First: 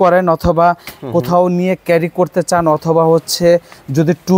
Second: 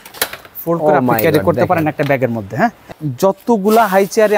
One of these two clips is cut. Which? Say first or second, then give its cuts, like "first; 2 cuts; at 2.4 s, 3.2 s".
second; 1 cut; at 2.9 s